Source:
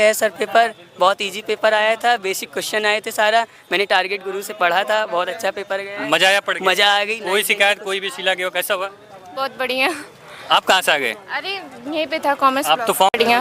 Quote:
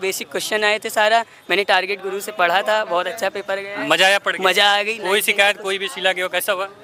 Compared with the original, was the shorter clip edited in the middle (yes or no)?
no